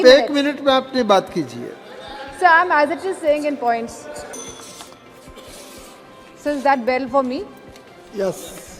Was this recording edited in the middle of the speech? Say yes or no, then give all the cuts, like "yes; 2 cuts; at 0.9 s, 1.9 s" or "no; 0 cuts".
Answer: yes; 1 cut; at 4.3 s